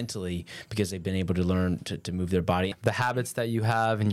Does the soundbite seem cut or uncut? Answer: cut